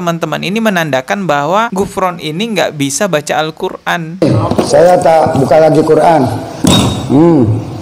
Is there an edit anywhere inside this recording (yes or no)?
yes